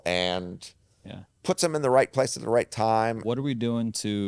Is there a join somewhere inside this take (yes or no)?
yes